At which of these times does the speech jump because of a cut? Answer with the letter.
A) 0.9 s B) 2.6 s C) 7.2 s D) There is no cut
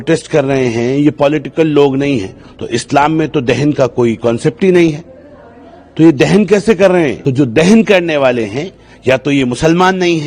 C